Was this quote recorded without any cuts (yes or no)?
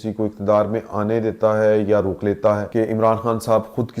no